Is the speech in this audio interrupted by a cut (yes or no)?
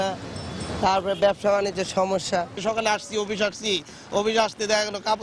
yes